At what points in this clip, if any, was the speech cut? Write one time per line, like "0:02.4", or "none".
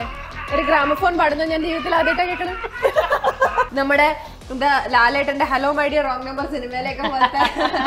0:03.7